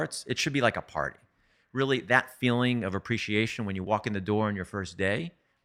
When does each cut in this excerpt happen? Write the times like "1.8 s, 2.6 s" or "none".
1.5 s